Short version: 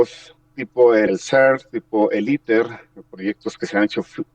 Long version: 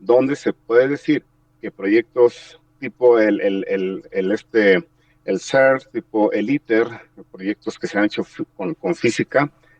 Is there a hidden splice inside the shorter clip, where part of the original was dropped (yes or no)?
yes